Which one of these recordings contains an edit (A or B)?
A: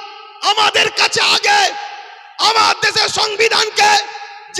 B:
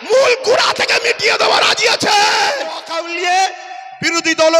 B